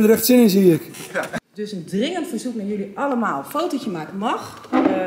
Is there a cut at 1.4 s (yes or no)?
yes